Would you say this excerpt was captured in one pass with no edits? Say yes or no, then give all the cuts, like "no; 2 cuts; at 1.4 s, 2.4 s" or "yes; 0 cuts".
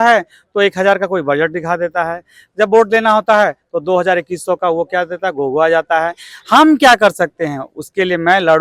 yes; 0 cuts